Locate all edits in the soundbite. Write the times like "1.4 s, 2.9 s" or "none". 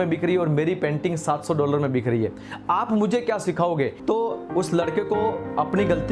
4.0 s